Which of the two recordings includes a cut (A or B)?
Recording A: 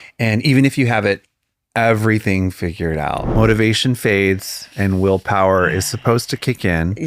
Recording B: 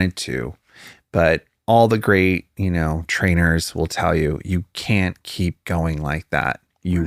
A